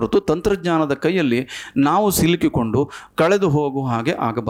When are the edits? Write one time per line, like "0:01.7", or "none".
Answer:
none